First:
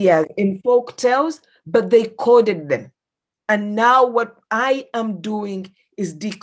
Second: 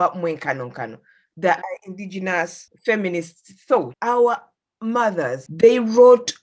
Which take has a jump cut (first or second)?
second